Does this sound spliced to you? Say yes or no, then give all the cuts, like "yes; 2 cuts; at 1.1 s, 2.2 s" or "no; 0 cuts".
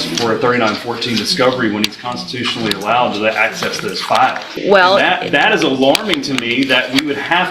yes; 1 cut; at 4.5 s